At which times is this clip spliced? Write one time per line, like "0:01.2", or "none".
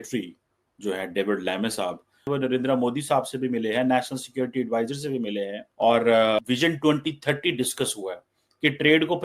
0:02.2
0:05.6
0:06.4